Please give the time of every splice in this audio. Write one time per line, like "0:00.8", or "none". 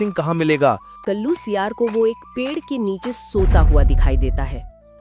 0:01.0